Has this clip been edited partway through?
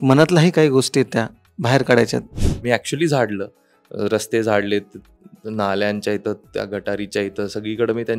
yes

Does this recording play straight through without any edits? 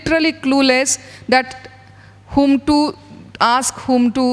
yes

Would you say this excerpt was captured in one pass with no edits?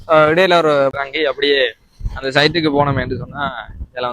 no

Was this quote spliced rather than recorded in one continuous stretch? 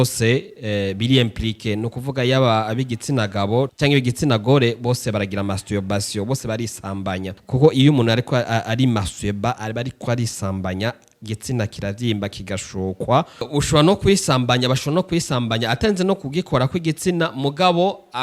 yes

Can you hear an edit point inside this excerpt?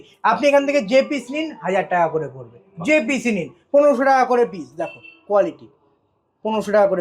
no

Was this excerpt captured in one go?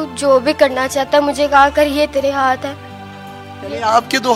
yes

